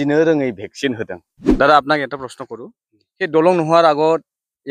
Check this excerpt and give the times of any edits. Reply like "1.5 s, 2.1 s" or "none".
1.6 s